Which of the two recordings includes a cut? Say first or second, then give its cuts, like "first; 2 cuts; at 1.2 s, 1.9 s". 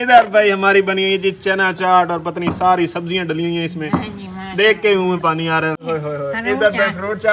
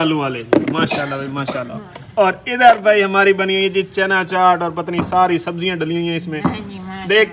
first; 1 cut; at 5.9 s